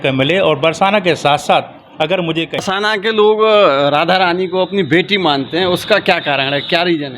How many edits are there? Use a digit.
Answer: 1